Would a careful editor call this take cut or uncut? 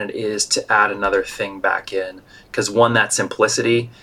uncut